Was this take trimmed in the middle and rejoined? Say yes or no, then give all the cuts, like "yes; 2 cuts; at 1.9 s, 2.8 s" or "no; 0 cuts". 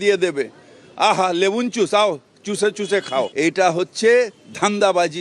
yes; 1 cut; at 3.3 s